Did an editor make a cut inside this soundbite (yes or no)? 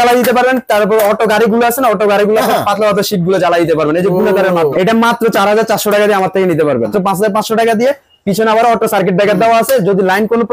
yes